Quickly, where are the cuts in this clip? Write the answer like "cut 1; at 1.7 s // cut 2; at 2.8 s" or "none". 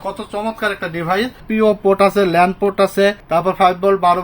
cut 1; at 1.4 s // cut 2; at 3.2 s

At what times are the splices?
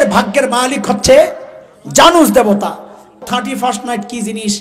cut 1; at 3.2 s

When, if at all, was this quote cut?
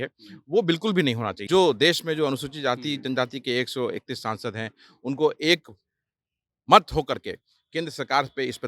cut 1; at 1.3 s

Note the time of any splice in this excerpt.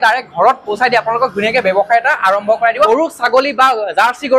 cut 1; at 2.9 s

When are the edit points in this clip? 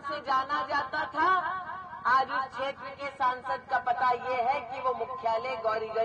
none

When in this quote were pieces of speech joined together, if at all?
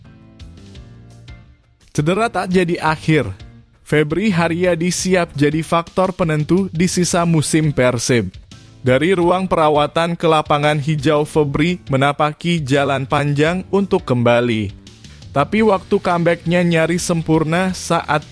cut 1; at 1.5 s

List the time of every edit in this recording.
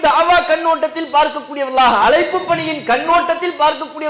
none

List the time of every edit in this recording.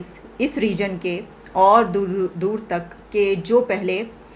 none

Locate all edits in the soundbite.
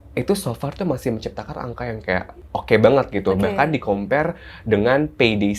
cut 1; at 2.4 s

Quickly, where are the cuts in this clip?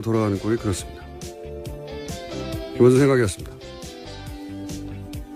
cut 1; at 2.3 s

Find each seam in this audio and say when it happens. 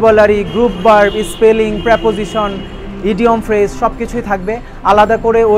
none

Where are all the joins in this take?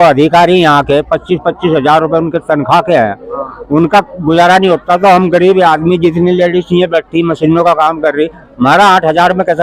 none

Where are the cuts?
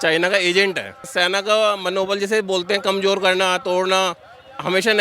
cut 1; at 1.1 s

